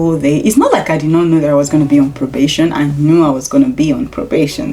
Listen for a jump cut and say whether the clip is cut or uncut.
uncut